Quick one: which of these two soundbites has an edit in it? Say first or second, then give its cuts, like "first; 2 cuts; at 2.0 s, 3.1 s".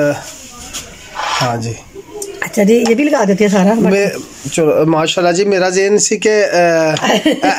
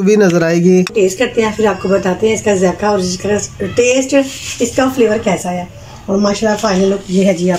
second; 1 cut; at 0.9 s